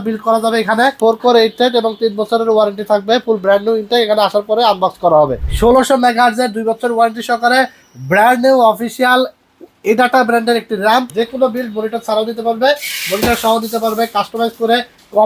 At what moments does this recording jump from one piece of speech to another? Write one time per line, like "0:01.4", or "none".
0:01.0
0:05.4
0:11.1